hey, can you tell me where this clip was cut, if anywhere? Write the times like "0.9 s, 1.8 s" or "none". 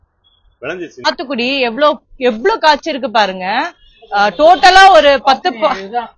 1.0 s